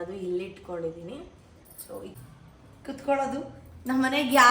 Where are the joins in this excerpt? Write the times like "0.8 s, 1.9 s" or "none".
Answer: 2.2 s